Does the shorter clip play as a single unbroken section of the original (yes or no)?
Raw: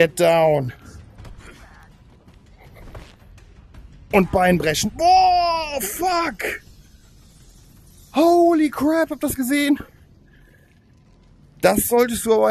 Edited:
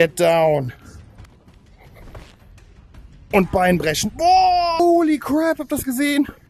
no